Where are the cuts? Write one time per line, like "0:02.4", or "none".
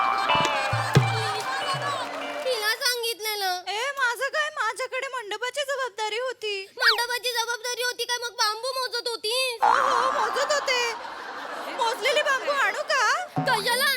0:02.4